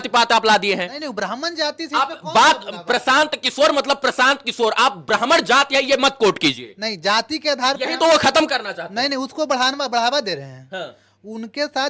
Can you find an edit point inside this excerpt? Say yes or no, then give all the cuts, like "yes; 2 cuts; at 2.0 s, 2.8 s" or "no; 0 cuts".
no; 0 cuts